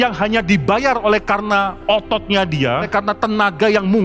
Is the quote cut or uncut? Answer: cut